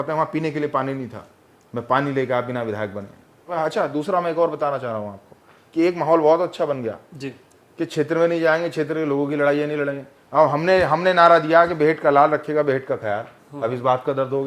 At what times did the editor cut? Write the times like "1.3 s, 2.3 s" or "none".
3.5 s